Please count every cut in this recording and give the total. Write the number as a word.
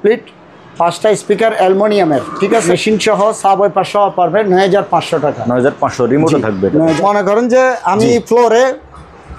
two